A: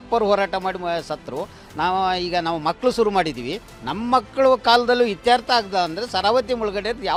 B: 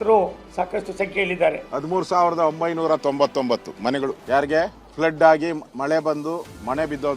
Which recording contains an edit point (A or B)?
B